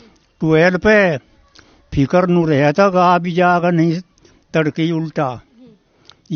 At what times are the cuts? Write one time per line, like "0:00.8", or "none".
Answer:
none